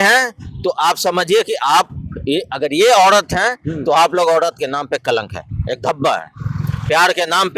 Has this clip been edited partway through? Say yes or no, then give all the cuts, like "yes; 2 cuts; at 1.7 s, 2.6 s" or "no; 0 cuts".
no; 0 cuts